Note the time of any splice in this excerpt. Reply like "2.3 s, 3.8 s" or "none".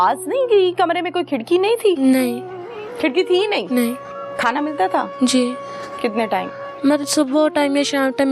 none